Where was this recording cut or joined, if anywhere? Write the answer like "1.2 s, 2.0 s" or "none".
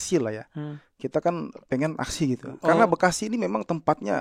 2.6 s